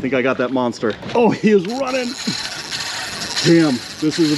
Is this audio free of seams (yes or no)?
no